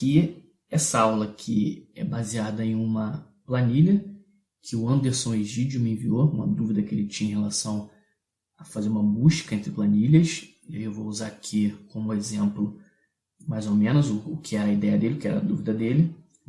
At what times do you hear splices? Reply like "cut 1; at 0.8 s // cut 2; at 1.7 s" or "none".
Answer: cut 1; at 1.3 s